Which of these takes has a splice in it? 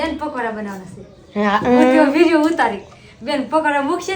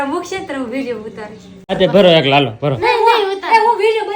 second; 1 cut; at 1.7 s

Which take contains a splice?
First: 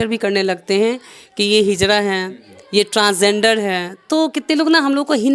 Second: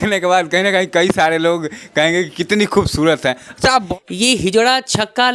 second; 1 cut; at 3.9 s

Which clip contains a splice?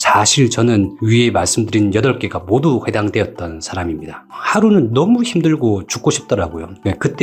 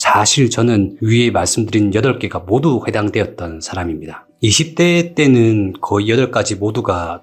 first; 1 cut; at 4.3 s

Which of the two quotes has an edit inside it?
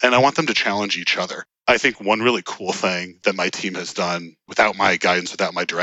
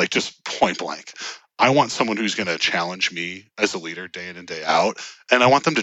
first; 3 cuts; at 1.5 s, 3.2 s, 4.4 s

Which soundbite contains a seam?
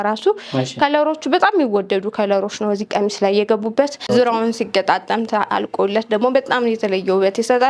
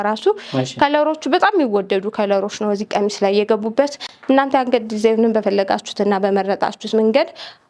first; 1 cut; at 4.1 s

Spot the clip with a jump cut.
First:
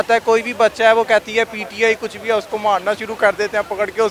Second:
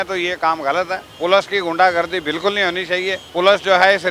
second; 2 cuts; at 1.0 s, 3.2 s

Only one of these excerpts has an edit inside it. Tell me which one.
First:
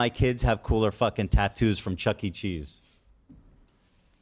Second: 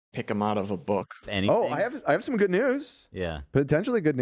second; 1 cut; at 1.2 s

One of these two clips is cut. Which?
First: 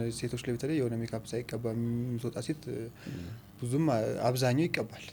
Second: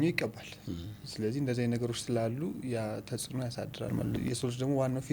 second; 1 cut; at 4.2 s

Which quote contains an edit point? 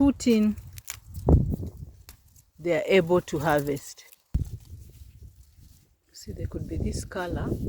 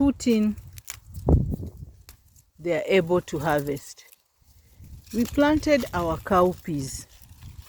first; 1 cut; at 4.3 s

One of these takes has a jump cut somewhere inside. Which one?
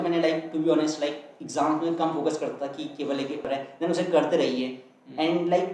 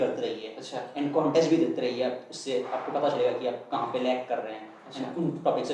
first; 1 cut; at 3.4 s

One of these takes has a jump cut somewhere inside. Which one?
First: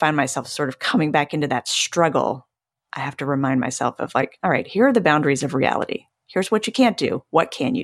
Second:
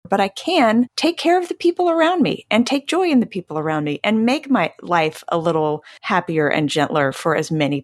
second; 2 cuts; at 0.9 s, 5.9 s

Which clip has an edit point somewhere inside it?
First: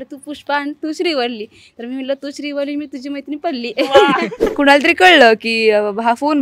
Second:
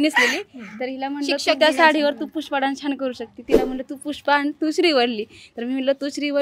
first; 2 cuts; at 3.7 s, 4.5 s

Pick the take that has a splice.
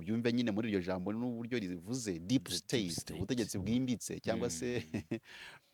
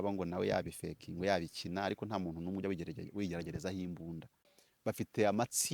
second; 1 cut; at 4.4 s

